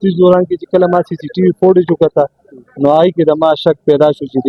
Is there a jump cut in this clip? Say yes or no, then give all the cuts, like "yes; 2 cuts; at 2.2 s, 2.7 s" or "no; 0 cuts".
no; 0 cuts